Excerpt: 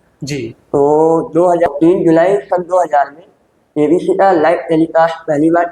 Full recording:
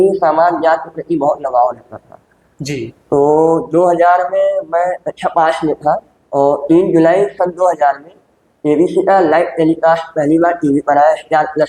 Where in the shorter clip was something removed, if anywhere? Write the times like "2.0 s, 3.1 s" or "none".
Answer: 1.7 s